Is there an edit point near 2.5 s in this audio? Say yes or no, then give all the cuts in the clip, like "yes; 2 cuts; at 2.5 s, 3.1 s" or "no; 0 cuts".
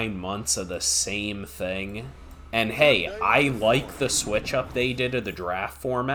no; 0 cuts